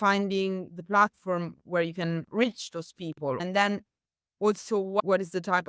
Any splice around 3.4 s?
yes; 2 cuts; at 3.4 s, 5.0 s

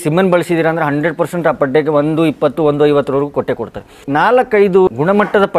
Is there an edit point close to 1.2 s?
no; 2 cuts; at 4.0 s, 4.9 s

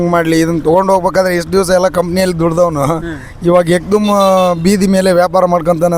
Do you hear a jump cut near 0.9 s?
no; 0 cuts

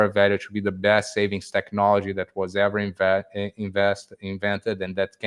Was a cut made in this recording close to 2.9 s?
no; 0 cuts

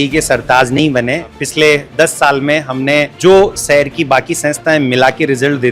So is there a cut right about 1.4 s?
yes; 2 cuts; at 1.4 s, 3.1 s

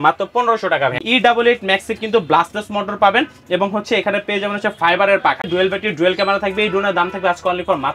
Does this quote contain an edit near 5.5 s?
yes; 2 cuts; at 1.0 s, 5.5 s

